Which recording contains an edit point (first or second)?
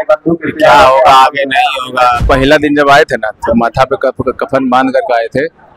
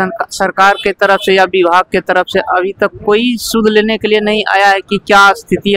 first